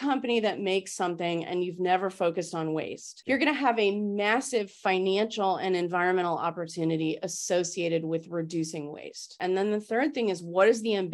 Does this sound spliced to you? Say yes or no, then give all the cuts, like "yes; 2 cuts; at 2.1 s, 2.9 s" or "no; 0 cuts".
no; 0 cuts